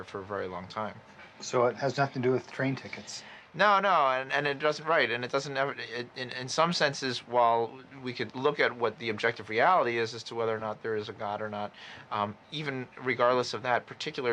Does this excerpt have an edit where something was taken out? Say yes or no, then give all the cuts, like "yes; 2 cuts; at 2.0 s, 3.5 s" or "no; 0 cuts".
no; 0 cuts